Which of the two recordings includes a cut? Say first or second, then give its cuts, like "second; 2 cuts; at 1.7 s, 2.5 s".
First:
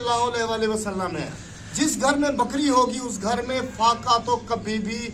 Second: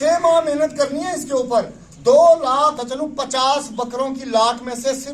second; 1 cut; at 2.8 s